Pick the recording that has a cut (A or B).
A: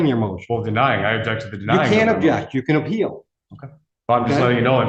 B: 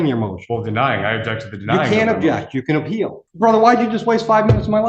B